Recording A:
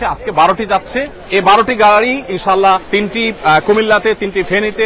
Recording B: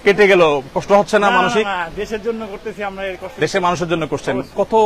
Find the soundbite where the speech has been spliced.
A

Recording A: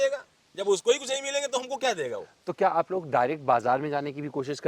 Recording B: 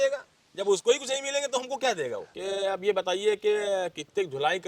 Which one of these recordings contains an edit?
B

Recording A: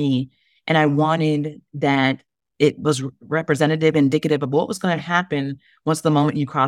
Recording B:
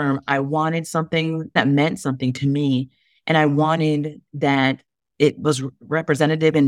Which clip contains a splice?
B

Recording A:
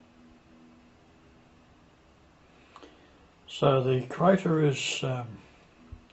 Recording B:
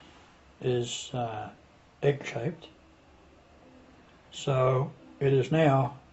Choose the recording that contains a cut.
B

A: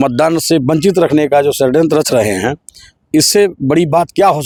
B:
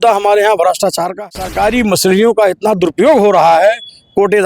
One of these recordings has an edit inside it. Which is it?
B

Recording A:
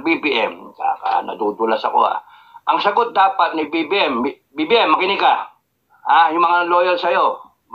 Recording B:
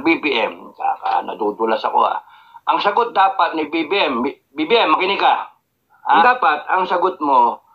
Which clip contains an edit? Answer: B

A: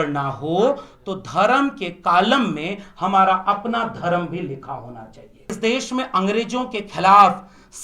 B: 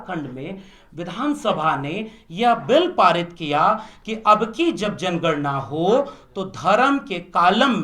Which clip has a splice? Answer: A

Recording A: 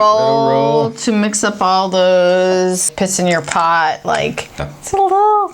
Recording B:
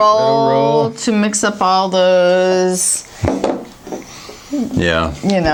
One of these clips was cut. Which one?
A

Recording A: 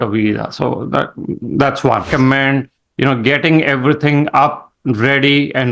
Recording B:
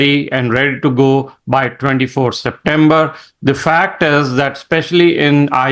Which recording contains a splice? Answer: A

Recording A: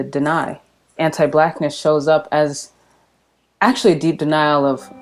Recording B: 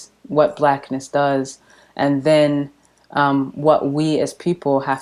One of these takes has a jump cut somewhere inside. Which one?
A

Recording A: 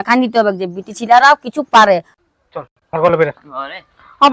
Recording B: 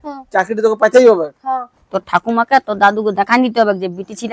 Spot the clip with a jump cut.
A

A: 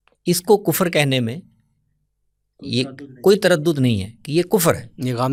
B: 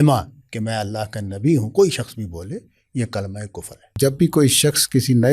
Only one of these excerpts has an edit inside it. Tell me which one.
B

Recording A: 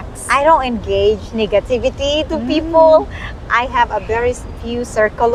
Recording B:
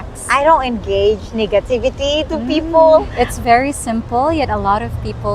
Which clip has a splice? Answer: B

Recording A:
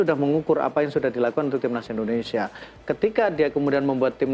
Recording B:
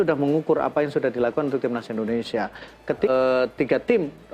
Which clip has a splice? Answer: B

